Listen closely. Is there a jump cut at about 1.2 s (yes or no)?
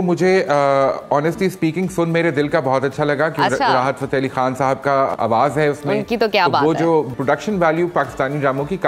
no